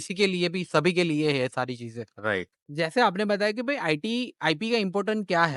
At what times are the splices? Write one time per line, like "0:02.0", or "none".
0:02.6